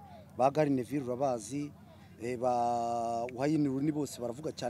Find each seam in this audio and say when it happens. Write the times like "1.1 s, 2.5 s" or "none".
none